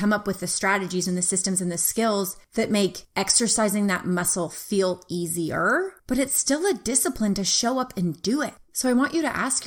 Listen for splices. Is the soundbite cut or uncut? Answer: uncut